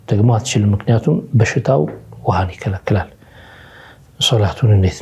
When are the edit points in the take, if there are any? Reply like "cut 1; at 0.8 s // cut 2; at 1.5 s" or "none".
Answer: none